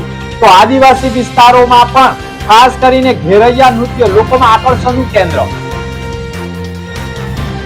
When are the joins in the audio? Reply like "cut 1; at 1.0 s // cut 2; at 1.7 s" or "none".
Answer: none